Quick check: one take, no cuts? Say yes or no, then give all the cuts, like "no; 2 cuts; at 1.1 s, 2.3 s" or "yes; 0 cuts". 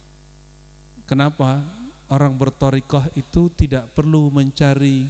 yes; 0 cuts